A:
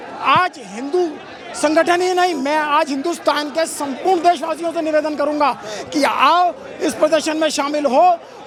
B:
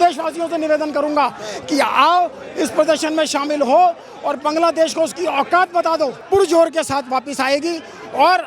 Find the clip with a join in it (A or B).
B